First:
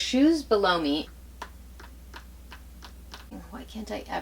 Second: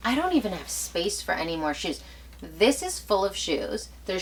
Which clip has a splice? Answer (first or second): first